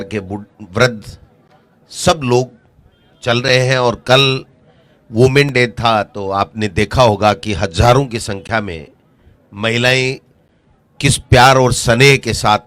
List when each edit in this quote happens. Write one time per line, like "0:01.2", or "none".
none